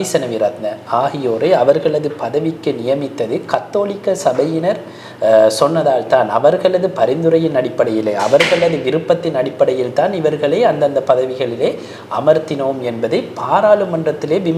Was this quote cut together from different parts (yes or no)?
no